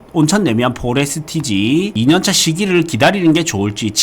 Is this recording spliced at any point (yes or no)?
yes